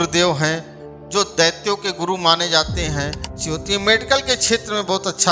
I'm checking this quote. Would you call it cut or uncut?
cut